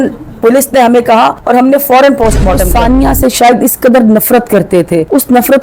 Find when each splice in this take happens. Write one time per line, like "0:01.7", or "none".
0:02.7